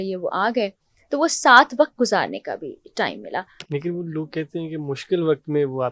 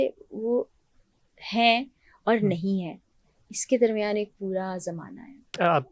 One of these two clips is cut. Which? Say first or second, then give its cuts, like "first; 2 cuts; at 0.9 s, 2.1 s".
first; 1 cut; at 3.6 s